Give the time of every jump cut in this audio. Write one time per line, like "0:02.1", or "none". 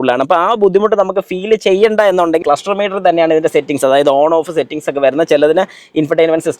0:02.4